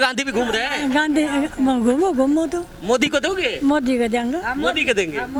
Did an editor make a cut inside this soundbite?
no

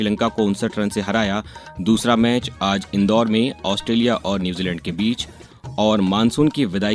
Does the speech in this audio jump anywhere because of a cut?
no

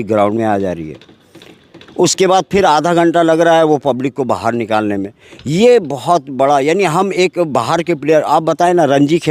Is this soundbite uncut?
yes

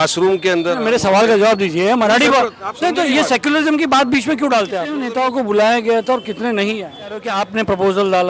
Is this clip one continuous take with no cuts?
no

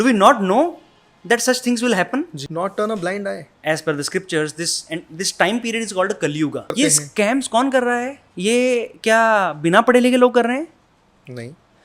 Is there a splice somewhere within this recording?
yes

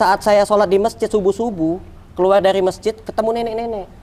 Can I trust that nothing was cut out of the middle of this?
yes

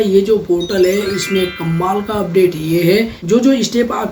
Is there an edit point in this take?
yes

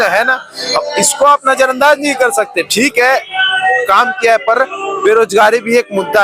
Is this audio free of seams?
yes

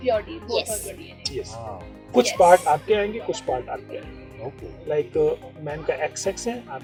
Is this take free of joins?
yes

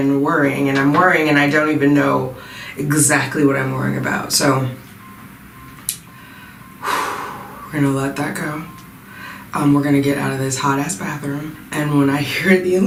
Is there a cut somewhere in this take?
no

